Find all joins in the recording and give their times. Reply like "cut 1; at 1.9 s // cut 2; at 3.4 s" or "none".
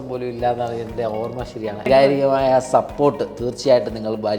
cut 1; at 1.9 s